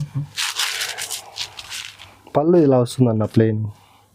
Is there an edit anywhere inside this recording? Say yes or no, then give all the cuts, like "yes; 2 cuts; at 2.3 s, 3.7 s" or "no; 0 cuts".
no; 0 cuts